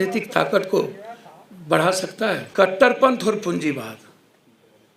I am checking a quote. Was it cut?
yes; 1 cut; at 2.5 s

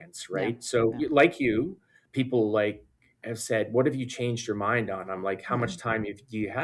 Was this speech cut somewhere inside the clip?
no; 0 cuts

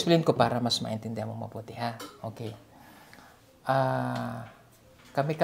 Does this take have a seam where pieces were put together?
no; 0 cuts

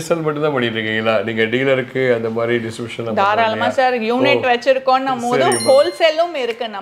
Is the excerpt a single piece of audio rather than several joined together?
yes; 0 cuts

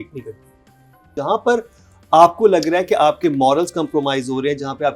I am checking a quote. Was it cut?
yes; 1 cut; at 1.2 s

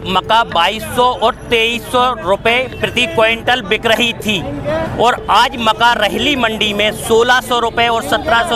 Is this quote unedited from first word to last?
yes; 0 cuts

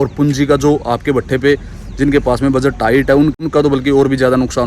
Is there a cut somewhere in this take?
yes; 1 cut; at 3.4 s

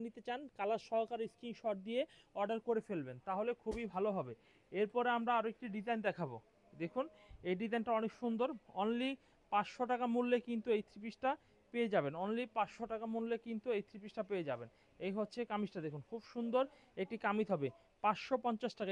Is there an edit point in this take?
no; 0 cuts

